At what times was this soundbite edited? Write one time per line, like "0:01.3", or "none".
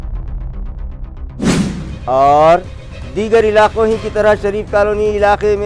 none